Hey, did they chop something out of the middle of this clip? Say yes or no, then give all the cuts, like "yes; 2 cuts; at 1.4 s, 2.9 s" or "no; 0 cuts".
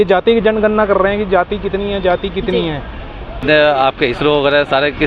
yes; 1 cut; at 3.4 s